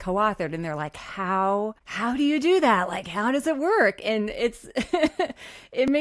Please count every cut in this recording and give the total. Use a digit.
1